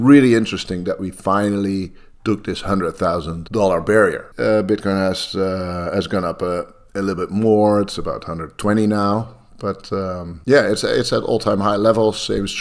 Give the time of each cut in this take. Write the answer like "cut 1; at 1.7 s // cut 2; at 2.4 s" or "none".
cut 1; at 3.4 s // cut 2; at 4.3 s // cut 3; at 10.3 s